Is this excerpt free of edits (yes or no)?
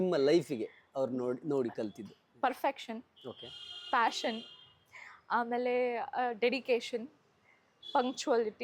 yes